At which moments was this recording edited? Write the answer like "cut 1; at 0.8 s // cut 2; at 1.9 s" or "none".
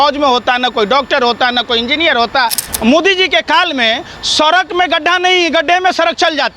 cut 1; at 2.6 s